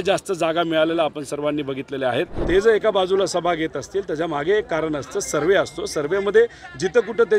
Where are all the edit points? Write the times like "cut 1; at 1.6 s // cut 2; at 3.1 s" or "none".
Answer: cut 1; at 2.4 s